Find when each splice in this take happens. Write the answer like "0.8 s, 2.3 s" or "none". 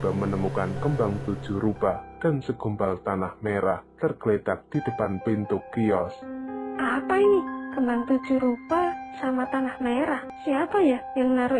10.3 s